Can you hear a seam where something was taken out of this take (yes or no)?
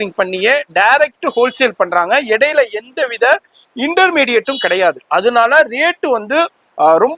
no